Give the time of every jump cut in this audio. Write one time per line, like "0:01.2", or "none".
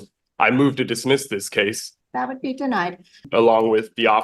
0:01.9
0:03.2